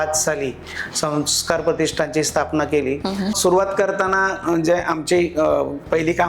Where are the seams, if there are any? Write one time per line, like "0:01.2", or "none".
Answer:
0:03.4